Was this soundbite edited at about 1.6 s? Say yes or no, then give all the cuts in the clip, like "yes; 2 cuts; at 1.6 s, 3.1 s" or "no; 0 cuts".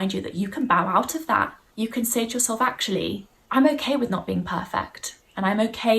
yes; 2 cuts; at 1.6 s, 3.3 s